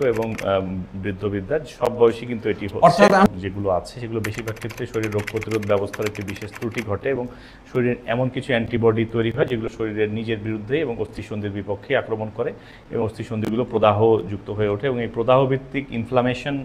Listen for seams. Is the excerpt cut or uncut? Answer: cut